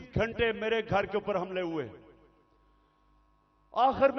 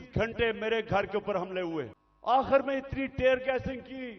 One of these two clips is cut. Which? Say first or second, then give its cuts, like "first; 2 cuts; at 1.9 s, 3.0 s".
second; 1 cut; at 2.0 s